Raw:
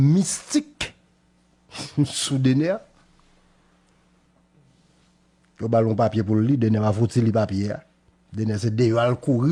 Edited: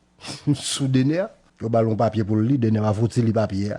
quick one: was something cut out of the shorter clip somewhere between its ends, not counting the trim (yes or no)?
yes